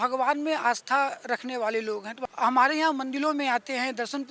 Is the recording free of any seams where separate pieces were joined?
no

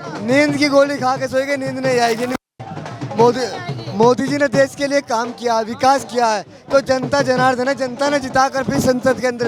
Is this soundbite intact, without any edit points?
yes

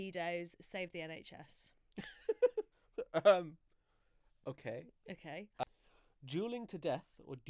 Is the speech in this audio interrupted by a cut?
yes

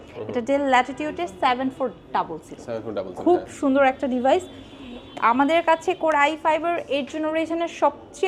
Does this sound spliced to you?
no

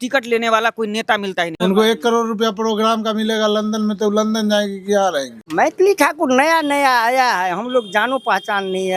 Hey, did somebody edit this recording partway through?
yes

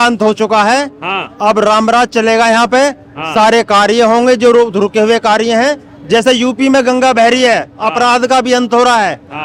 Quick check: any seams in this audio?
no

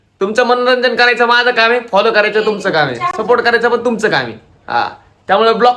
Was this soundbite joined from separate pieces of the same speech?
no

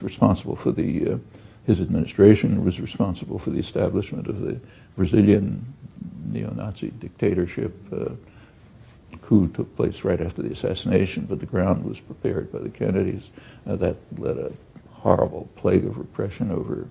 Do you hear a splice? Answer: yes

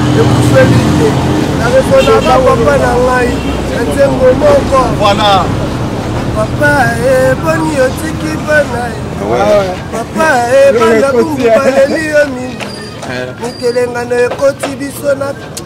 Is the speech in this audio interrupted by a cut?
no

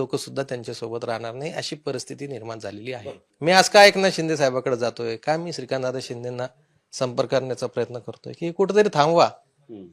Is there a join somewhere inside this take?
yes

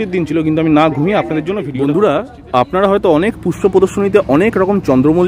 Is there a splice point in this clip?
yes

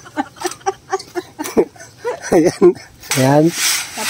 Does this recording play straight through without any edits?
no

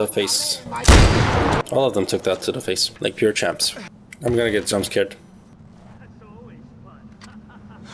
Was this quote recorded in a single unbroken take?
yes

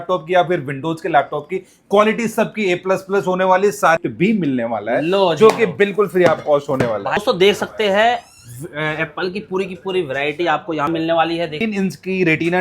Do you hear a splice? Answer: yes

